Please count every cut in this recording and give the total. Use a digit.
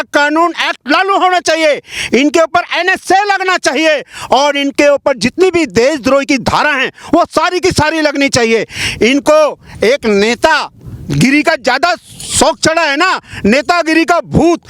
0